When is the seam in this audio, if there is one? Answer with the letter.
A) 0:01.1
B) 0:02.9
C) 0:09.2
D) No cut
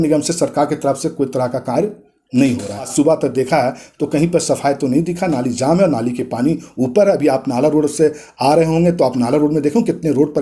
B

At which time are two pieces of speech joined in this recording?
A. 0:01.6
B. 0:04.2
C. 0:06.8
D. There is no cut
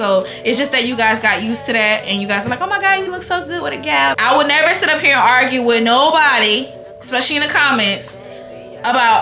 B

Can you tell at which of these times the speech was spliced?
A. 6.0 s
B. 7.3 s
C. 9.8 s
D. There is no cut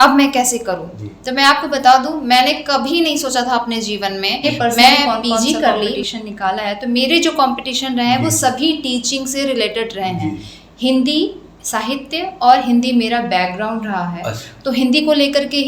A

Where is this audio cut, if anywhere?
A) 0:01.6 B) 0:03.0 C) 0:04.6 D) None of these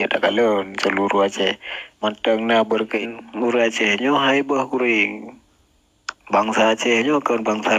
B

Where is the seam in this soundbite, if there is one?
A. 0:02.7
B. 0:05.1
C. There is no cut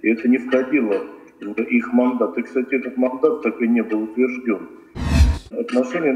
B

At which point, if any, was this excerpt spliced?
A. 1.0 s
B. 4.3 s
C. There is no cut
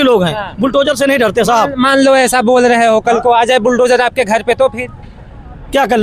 C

